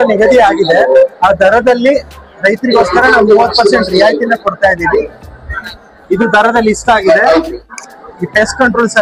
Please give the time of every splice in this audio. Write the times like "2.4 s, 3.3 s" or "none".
7.7 s